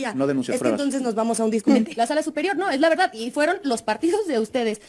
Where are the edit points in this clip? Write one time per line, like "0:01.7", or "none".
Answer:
0:01.7